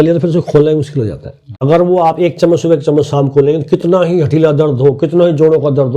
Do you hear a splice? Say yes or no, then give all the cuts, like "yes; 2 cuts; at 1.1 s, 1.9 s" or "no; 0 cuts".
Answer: yes; 1 cut; at 1.5 s